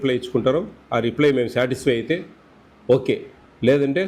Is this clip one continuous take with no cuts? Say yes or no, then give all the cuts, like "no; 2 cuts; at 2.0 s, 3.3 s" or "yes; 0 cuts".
yes; 0 cuts